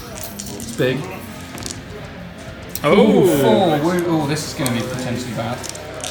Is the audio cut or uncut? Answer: uncut